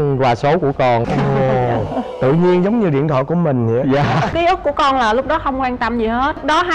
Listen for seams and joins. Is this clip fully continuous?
yes; 0 cuts

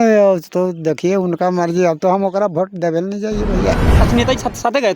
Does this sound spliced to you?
yes; 1 cut; at 3.9 s

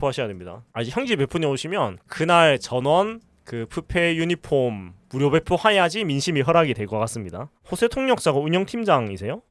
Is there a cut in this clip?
no; 0 cuts

